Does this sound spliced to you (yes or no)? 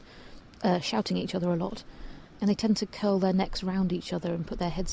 yes